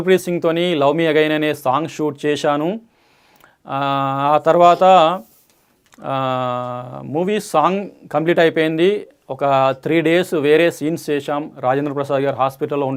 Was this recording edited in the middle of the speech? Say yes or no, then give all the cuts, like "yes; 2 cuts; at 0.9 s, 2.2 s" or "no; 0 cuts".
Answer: no; 0 cuts